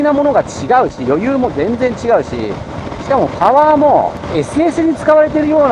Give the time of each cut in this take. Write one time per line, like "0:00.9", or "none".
0:04.2